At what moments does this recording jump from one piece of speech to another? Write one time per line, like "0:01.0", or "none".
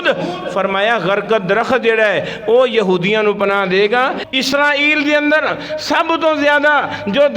0:04.2